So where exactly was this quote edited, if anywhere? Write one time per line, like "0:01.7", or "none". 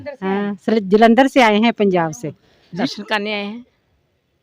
0:02.8